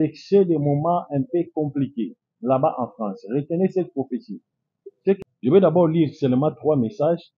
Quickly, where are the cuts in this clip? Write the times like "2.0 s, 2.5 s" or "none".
5.2 s